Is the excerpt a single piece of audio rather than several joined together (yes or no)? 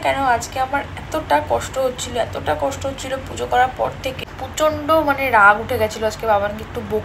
no